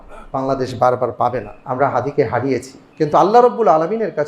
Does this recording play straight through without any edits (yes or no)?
no